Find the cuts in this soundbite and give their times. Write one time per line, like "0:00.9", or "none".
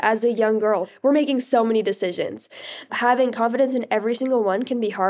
0:00.9
0:02.9